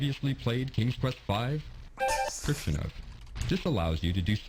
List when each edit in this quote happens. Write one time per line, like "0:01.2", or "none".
0:02.4